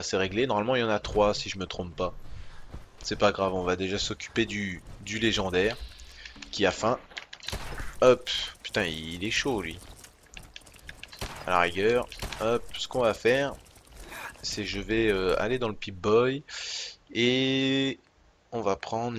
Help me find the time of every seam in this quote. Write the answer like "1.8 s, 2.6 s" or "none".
none

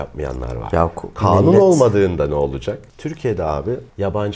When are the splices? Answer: 2.9 s

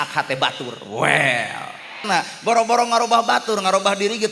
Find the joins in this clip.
2.0 s

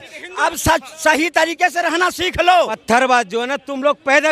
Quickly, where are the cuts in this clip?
2.8 s

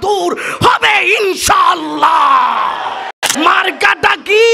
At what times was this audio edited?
3.2 s

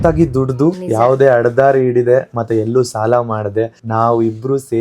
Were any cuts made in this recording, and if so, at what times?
0.8 s, 3.8 s

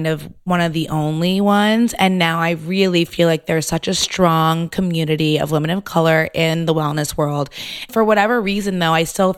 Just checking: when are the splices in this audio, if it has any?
none

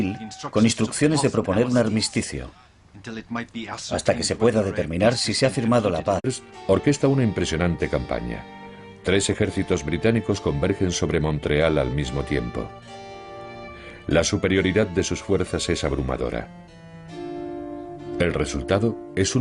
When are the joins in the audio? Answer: none

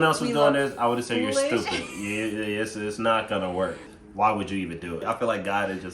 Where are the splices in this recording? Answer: 3.9 s, 5.0 s

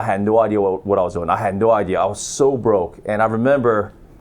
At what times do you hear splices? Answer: none

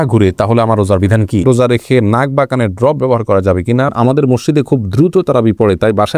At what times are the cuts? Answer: 1.4 s, 3.9 s

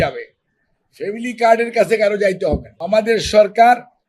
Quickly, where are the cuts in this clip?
2.7 s

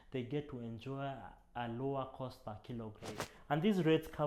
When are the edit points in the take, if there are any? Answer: 3.3 s

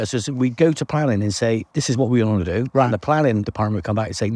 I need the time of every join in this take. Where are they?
1.7 s, 3.5 s

